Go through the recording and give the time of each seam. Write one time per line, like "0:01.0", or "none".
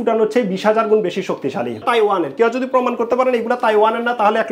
0:01.8